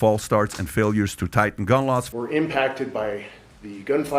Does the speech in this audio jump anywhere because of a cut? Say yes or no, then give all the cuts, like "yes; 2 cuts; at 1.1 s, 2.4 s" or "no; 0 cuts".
yes; 1 cut; at 2.1 s